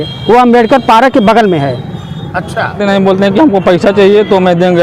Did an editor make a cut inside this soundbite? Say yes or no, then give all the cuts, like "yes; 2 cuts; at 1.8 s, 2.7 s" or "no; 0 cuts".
yes; 1 cut; at 2.8 s